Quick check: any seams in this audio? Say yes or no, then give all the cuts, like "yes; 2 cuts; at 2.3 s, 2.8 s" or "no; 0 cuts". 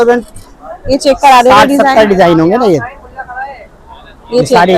no; 0 cuts